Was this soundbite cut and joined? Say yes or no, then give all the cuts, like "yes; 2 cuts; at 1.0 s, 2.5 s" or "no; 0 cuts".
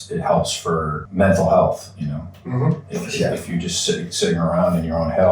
yes; 1 cut; at 1.0 s